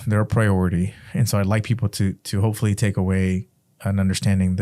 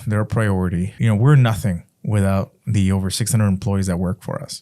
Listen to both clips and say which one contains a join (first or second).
second